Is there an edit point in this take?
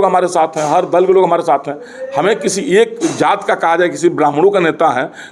no; 0 cuts

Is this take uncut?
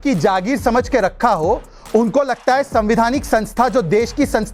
yes; 0 cuts

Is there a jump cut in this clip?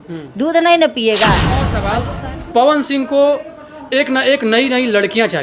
yes; 1 cut; at 1.8 s

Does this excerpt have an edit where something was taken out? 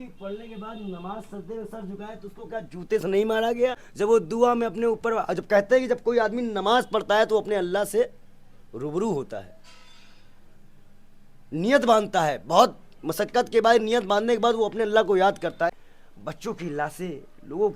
yes; 2 cuts; at 3.9 s, 15.8 s

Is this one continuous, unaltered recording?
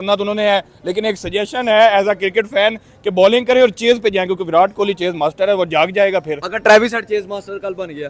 yes; 0 cuts

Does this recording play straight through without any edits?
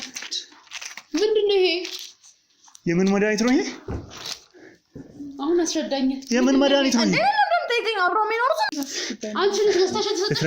no; 1 cut; at 8.7 s

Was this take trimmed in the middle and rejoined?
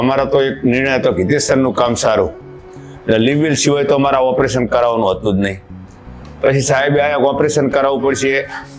no; 0 cuts

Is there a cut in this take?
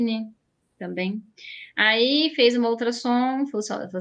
no; 0 cuts

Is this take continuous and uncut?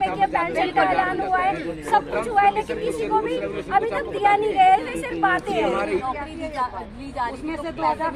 yes; 0 cuts

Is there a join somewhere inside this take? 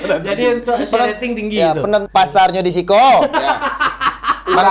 yes; 1 cut; at 2.0 s

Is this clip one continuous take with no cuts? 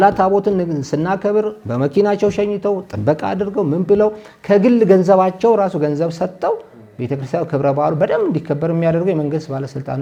yes; 0 cuts

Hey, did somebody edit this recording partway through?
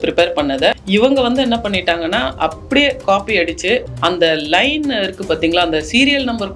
no; 0 cuts

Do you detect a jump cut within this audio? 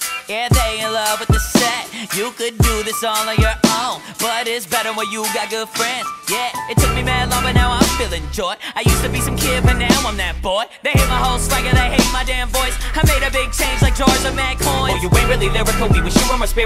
yes; 1 cut; at 10.4 s

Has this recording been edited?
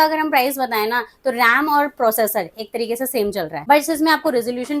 yes; 1 cut; at 3.5 s

